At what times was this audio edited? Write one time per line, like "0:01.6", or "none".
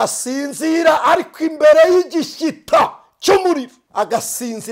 0:03.8